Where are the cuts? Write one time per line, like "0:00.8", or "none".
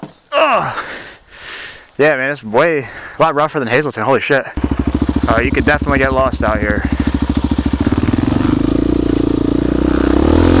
0:04.6
0:07.8